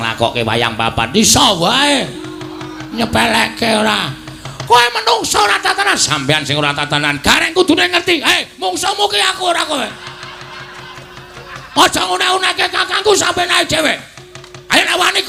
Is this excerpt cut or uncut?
uncut